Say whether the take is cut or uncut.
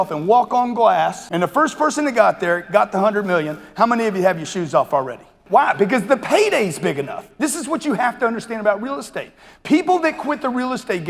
cut